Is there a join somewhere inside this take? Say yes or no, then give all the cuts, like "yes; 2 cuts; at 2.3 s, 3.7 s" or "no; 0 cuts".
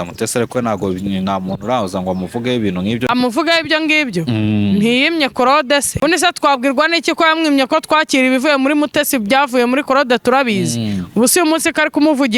yes; 2 cuts; at 3.1 s, 6.0 s